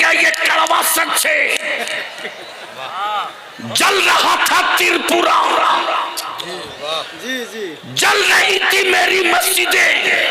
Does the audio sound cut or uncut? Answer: uncut